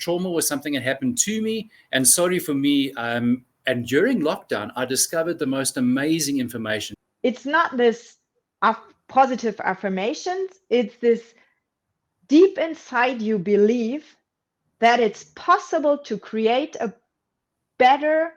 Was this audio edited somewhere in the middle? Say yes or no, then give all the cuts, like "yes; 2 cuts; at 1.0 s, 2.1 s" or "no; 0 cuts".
yes; 1 cut; at 6.9 s